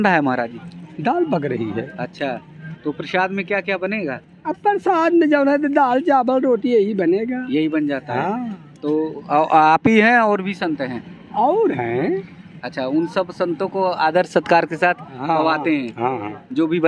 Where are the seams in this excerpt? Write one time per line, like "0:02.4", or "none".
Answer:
none